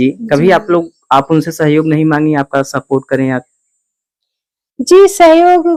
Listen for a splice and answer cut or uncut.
uncut